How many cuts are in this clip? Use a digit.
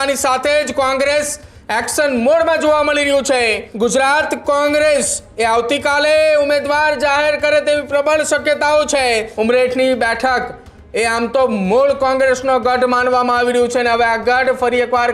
2